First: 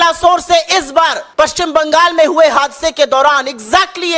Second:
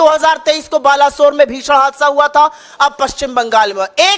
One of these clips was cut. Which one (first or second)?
first